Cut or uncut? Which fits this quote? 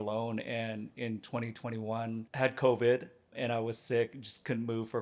cut